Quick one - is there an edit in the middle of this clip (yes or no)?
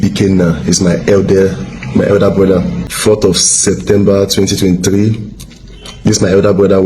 yes